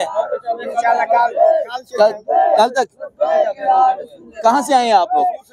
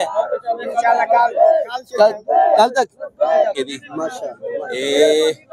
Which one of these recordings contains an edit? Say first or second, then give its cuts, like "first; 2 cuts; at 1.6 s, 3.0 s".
second; 1 cut; at 3.6 s